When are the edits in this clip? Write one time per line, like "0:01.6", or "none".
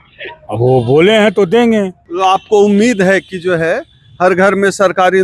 0:02.0